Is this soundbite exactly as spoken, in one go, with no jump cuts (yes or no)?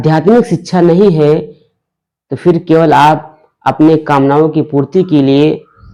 yes